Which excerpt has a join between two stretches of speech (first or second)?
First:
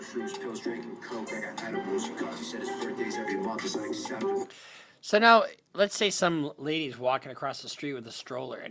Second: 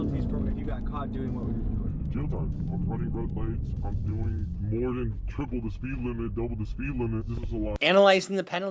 second